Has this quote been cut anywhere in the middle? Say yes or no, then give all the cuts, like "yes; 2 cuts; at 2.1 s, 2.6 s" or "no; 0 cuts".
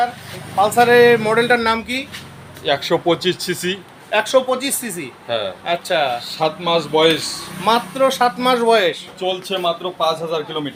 no; 0 cuts